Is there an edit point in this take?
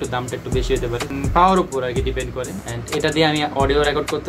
yes; 2 cuts; at 1.1 s, 2.7 s

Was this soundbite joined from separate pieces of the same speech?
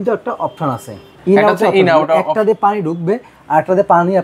yes; 1 cut; at 1.1 s

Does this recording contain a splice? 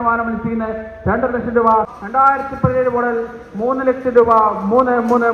yes; 1 cut; at 1.9 s

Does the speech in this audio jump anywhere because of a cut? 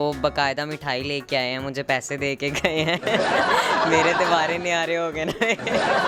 no; 0 cuts

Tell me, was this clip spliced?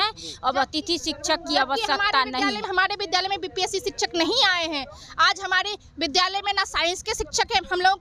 yes; 1 cut; at 2.7 s

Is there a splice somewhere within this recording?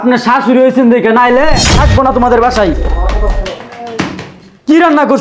yes; 1 cut; at 1.7 s

